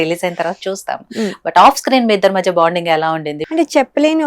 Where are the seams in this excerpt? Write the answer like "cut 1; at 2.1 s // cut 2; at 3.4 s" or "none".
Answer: cut 1; at 3.4 s